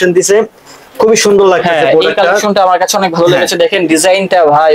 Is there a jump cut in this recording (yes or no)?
no